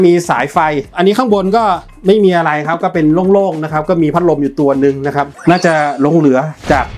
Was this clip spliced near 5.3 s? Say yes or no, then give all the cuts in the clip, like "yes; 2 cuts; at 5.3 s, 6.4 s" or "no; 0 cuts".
yes; 1 cut; at 5.3 s